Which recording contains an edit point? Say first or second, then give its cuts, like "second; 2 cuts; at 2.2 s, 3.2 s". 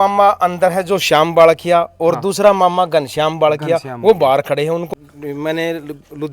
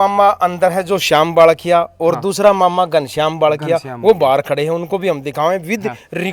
first; 1 cut; at 4.9 s